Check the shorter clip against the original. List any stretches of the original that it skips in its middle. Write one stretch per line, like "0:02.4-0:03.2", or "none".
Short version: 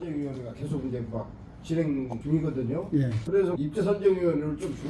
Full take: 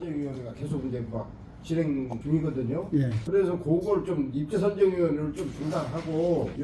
0:03.6-0:04.4

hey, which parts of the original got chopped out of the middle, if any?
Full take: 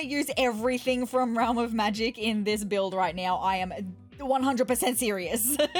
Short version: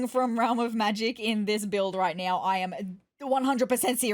none

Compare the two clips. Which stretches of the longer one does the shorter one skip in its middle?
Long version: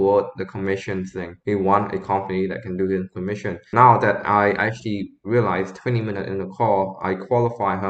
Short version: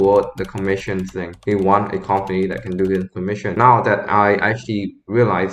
0:03.5-0:03.7

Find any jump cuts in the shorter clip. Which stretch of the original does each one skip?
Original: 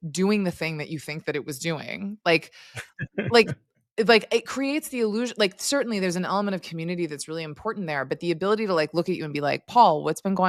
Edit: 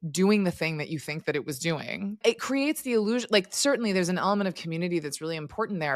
0:02.2-0:04.3

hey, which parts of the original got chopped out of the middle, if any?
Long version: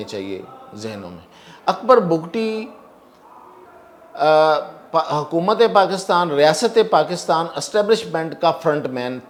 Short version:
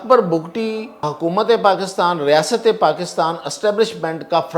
0:02.8-0:05.2

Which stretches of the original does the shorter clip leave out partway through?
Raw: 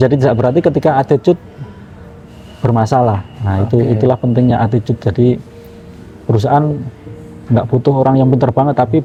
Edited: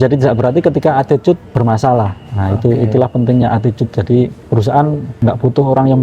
0:01.5-0:02.5
0:05.5-0:06.2
0:06.9-0:07.4

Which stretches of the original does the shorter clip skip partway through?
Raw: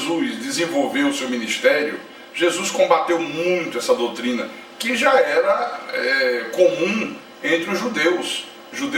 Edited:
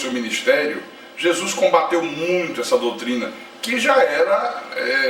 none

